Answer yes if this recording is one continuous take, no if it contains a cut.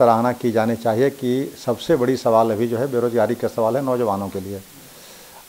yes